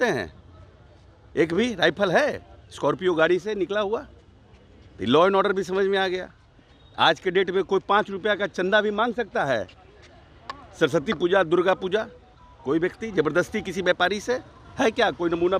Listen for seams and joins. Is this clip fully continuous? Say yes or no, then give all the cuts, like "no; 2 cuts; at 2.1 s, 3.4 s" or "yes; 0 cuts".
yes; 0 cuts